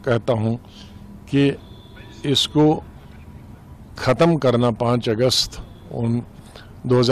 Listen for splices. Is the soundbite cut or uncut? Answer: uncut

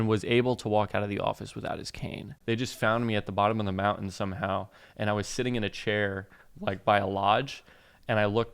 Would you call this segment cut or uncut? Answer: cut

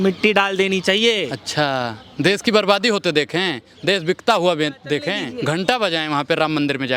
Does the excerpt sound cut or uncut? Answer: cut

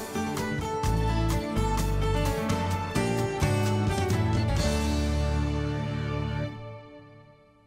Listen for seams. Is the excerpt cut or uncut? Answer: uncut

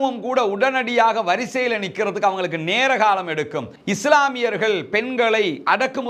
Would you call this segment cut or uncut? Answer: cut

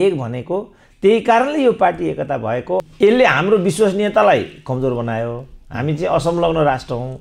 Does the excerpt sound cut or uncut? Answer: cut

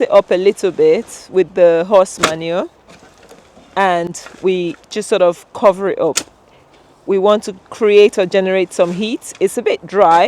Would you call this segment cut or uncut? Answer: uncut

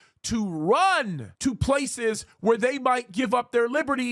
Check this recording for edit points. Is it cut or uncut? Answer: uncut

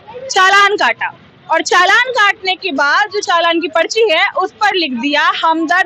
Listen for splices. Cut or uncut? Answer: uncut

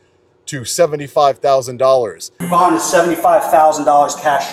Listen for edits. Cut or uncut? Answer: uncut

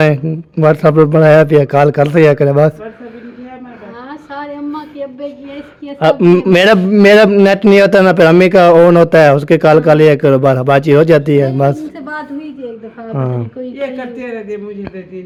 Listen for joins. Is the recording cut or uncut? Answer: uncut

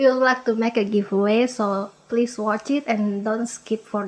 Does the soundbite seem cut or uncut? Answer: uncut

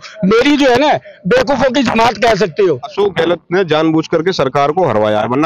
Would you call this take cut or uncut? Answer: cut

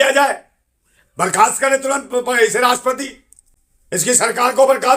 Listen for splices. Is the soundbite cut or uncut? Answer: uncut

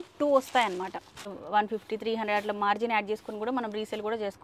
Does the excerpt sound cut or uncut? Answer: cut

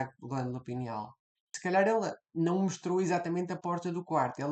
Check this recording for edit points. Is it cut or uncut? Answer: cut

